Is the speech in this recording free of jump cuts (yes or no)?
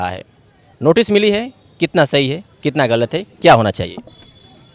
yes